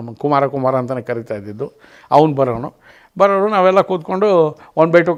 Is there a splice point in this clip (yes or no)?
no